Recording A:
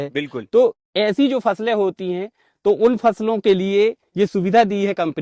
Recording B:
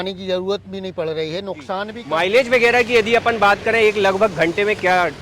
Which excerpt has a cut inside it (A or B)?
B